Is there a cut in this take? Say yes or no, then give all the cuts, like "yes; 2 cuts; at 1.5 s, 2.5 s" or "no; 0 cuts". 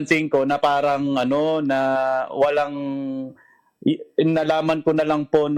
no; 0 cuts